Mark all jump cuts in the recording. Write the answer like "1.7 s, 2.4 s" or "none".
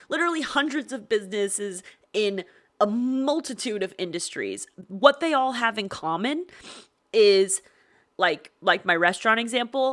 none